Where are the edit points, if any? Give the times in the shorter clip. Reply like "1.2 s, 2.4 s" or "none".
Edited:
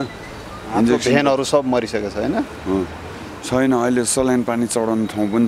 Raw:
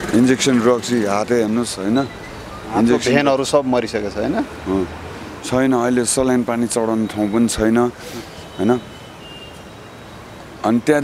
none